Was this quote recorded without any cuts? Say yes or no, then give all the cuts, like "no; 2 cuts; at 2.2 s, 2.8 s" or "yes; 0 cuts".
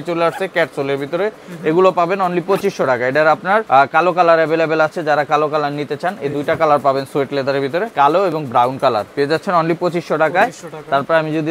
yes; 0 cuts